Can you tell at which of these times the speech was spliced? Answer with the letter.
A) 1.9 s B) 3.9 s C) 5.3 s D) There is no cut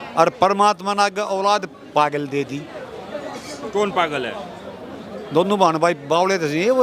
D